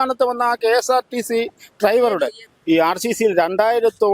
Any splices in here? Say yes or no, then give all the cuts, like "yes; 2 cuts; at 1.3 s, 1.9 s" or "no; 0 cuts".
yes; 1 cut; at 2.5 s